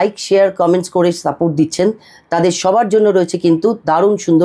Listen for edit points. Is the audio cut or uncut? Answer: uncut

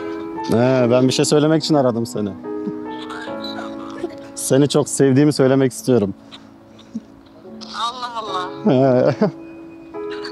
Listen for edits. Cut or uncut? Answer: uncut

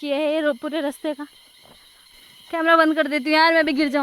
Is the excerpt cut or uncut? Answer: cut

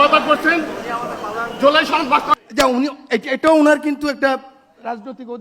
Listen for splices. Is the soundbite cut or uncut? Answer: cut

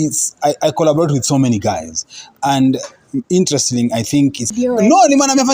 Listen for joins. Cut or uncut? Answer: cut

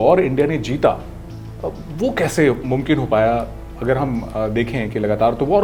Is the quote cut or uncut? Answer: uncut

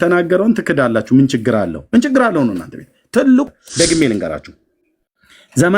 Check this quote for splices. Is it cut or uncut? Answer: cut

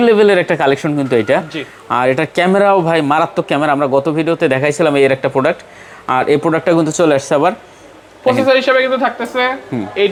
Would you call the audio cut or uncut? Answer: uncut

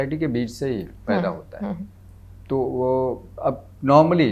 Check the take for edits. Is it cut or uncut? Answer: uncut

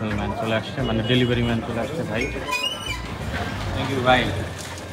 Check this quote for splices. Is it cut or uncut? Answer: uncut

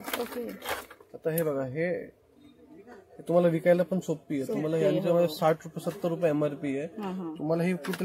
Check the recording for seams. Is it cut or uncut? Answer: uncut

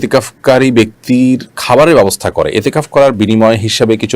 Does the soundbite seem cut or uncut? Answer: cut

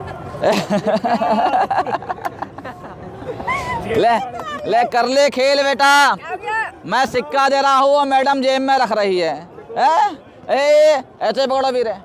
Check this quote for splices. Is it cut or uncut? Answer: uncut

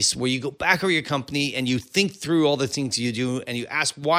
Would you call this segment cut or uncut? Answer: uncut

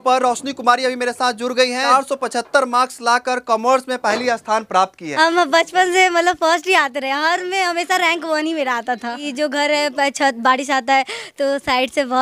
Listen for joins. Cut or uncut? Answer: cut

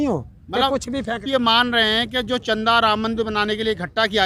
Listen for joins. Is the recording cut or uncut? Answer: cut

